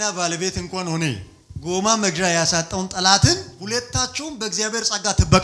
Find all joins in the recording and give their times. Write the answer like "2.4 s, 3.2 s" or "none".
3.5 s